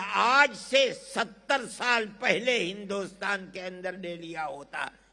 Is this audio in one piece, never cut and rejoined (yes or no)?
yes